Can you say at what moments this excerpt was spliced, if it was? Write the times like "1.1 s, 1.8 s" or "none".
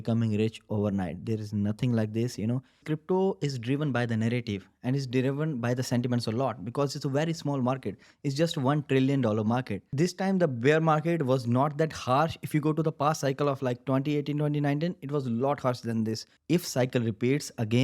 2.8 s, 9.9 s, 16.3 s